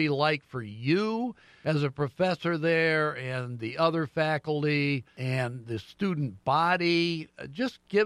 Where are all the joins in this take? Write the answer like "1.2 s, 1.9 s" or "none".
1.5 s, 5.1 s